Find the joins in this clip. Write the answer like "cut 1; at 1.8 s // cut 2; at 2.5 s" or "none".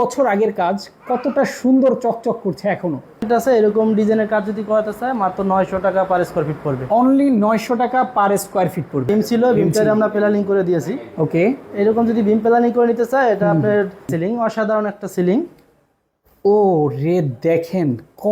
cut 1; at 3.3 s // cut 2; at 9.1 s // cut 3; at 14.1 s